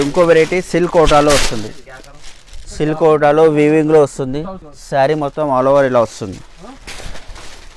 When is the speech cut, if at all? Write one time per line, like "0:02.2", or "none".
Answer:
none